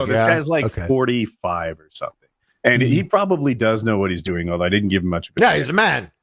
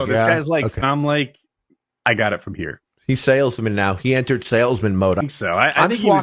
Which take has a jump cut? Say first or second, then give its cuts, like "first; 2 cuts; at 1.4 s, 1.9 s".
second; 2 cuts; at 0.8 s, 5.2 s